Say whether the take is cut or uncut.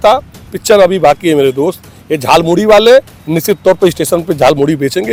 uncut